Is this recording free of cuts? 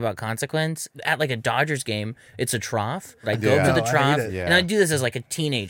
no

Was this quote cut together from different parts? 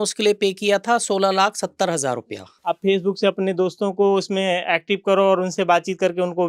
yes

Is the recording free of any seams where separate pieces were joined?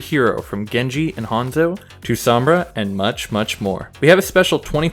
no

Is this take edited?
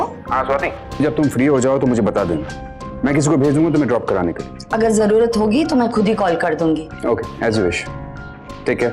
yes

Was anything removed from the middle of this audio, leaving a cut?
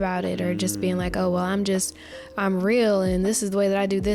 no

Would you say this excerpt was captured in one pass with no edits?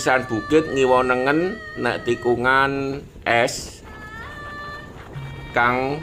yes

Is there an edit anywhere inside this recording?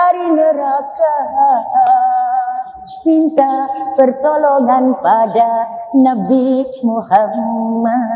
no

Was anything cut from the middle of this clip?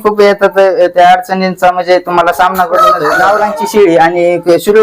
yes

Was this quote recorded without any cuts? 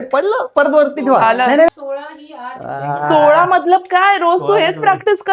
no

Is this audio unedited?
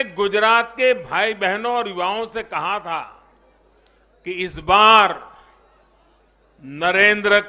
yes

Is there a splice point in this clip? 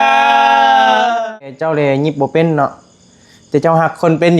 yes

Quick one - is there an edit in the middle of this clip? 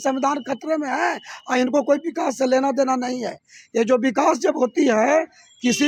no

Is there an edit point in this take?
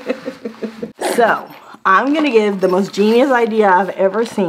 no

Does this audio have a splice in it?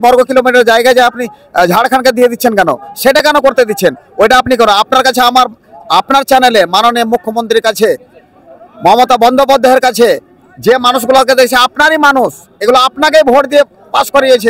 no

